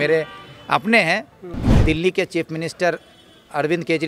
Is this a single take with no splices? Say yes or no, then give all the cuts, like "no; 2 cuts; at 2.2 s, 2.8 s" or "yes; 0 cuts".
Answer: no; 1 cut; at 1.5 s